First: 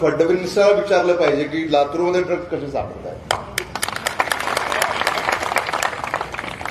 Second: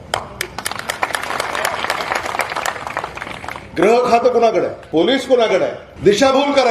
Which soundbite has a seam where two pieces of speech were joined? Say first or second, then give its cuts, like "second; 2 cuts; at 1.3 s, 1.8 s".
second; 2 cuts; at 4.8 s, 5.8 s